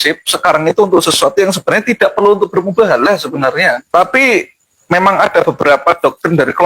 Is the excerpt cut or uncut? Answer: cut